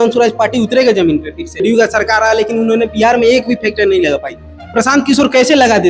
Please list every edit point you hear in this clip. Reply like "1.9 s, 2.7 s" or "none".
1.6 s